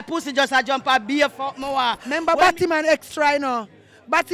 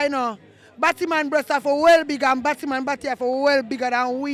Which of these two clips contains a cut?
first; 1 cut; at 2.1 s

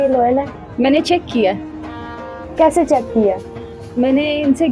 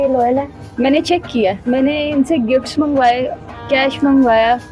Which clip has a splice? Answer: second; 1 cut; at 1.6 s

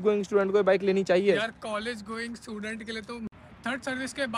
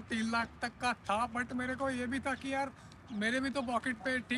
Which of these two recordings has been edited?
first; 1 cut; at 3.5 s

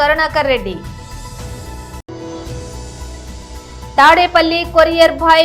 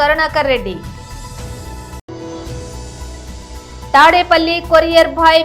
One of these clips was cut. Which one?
first; 3 cuts; at 0.8 s, 2.0 s, 3.9 s

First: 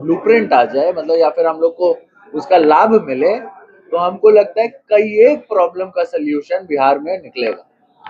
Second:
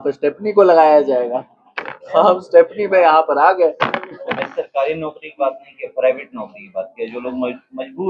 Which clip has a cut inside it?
second; 1 cut; at 4.2 s

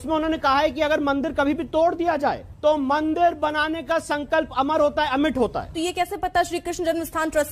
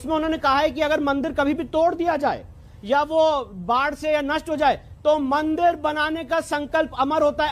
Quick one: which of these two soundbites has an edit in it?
first; 2 cuts; at 2.5 s, 5.7 s

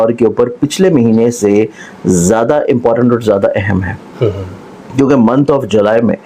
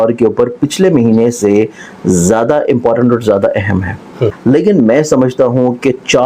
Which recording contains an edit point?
second; 1 cut; at 4.4 s

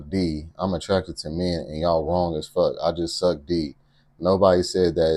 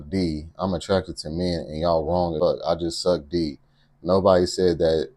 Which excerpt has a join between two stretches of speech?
second; 1 cut; at 2.3 s

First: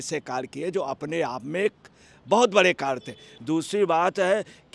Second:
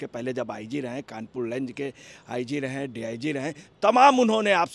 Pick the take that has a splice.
first; 1 cut; at 3.3 s

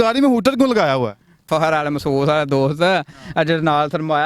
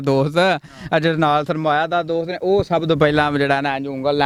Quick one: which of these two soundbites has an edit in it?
first; 1 cut; at 1.4 s

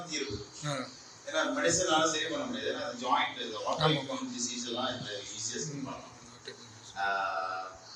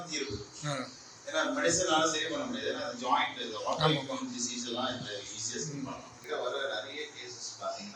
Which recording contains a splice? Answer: second; 1 cut; at 6.2 s

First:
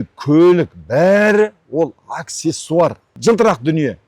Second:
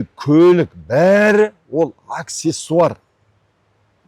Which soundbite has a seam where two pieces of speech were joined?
first; 1 cut; at 3.1 s

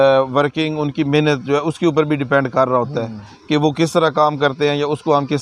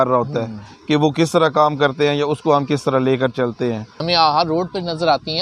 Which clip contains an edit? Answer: second; 1 cut; at 3.9 s

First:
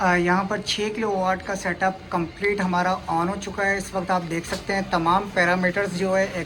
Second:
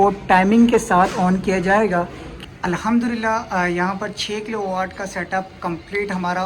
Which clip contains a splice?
second; 1 cut; at 2.2 s

